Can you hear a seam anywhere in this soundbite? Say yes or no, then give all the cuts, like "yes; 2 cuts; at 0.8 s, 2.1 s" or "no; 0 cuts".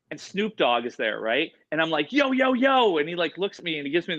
no; 0 cuts